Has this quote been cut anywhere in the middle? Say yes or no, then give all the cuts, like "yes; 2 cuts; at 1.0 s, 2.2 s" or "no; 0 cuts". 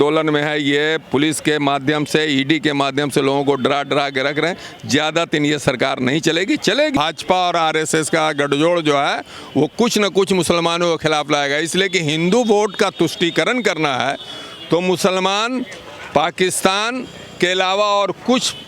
yes; 1 cut; at 7.0 s